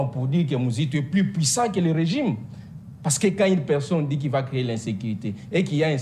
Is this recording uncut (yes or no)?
yes